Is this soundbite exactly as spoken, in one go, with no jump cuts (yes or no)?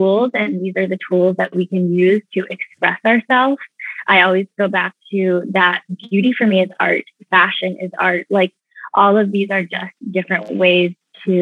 yes